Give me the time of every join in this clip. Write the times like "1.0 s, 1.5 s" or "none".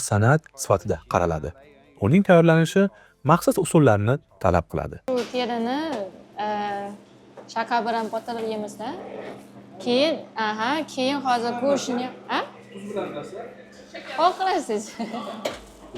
5.0 s